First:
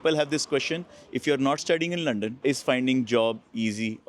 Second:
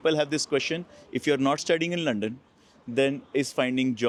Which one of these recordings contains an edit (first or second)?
first